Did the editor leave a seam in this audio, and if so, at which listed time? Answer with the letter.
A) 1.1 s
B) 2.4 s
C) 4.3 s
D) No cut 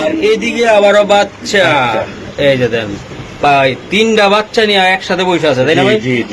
D